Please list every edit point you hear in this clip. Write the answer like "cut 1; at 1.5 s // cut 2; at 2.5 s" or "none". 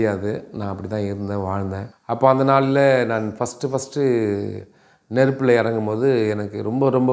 cut 1; at 1.9 s